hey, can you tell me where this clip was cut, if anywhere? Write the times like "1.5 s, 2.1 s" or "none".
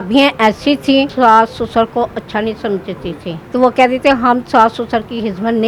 1.1 s, 3.4 s